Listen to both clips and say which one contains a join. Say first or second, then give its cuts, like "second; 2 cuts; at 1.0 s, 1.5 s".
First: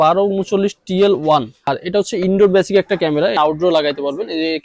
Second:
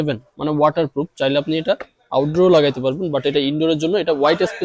first; 2 cuts; at 1.7 s, 3.3 s